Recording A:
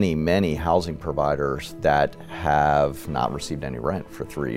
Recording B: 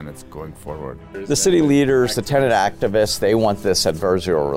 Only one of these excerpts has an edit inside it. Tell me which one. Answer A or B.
B